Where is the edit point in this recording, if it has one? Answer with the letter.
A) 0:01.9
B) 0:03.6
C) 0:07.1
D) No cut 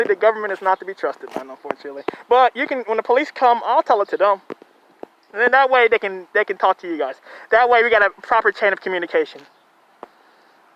D